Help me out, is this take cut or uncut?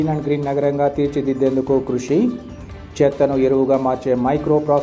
uncut